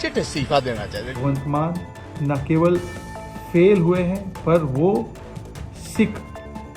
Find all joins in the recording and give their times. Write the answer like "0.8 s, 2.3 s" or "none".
1.1 s

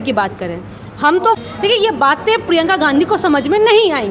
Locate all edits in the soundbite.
1.4 s

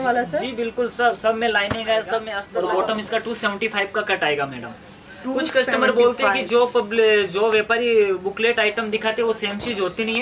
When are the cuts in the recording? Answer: 2.4 s

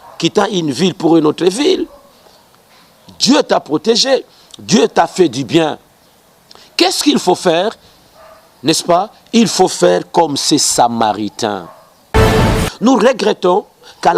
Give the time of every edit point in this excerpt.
12.4 s

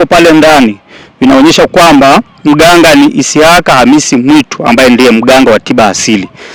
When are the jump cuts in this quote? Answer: none

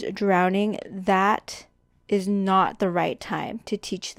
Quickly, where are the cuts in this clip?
none

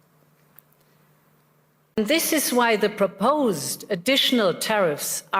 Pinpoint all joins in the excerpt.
2.0 s

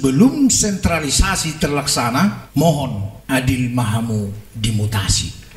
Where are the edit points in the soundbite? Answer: 2.4 s, 3.1 s

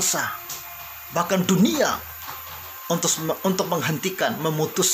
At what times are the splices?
none

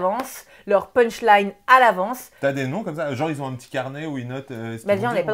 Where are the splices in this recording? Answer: none

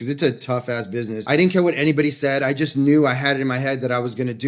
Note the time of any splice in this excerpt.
1.2 s

